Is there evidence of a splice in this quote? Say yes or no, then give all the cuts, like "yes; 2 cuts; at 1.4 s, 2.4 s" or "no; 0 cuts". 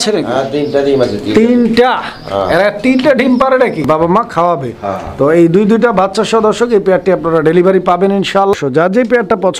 yes; 2 cuts; at 3.9 s, 8.5 s